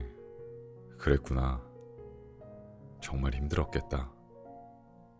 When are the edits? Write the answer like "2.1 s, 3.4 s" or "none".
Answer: 4.1 s